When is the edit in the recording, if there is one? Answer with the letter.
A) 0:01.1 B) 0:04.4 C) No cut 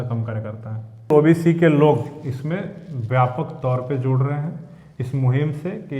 A